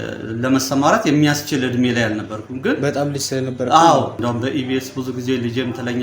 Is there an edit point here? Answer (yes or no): yes